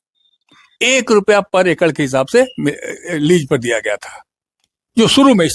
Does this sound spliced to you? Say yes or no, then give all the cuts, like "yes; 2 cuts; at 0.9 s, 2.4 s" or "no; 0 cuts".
no; 0 cuts